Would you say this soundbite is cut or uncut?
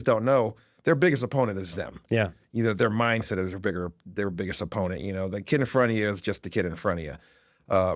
uncut